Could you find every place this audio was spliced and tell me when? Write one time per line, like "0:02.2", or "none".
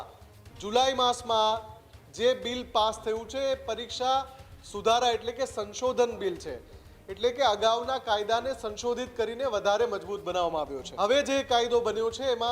0:10.8